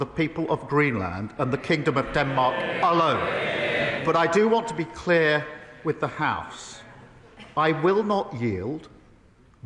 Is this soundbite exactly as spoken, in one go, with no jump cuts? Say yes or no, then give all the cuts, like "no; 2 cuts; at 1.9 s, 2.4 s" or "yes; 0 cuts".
no; 1 cut; at 4.0 s